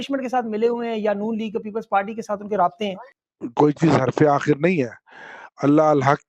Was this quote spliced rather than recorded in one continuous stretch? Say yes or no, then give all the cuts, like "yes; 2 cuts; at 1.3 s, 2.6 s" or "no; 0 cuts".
yes; 1 cut; at 3.0 s